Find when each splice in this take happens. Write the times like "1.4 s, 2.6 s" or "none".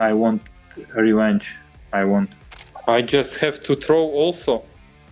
2.6 s